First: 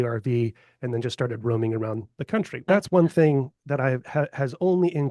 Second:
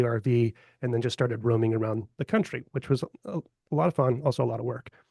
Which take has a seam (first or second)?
first